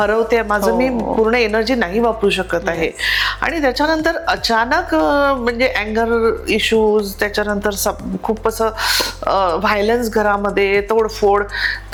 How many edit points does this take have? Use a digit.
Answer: 0